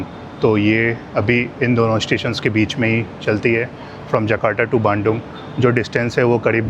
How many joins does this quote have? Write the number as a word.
zero